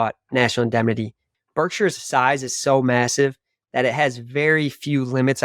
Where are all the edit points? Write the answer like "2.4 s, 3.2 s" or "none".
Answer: 1.2 s

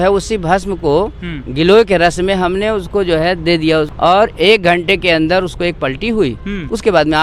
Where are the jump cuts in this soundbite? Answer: 3.9 s

